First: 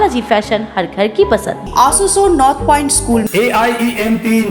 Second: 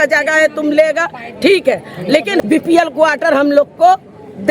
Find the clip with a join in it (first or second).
second